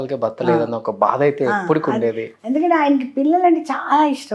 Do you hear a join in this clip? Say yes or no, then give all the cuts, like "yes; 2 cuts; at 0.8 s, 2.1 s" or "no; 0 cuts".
no; 0 cuts